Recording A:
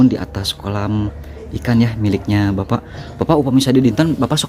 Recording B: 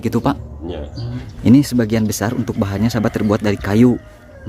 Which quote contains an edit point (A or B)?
B